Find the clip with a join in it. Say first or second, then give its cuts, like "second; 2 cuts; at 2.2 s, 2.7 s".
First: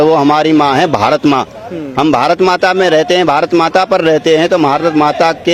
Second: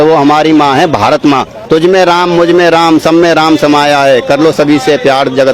second; 1 cut; at 1.5 s